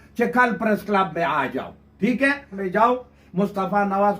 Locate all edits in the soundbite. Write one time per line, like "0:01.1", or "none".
0:02.6